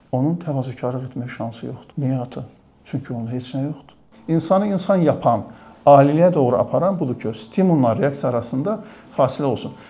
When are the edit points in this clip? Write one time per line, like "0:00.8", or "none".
0:01.8
0:04.1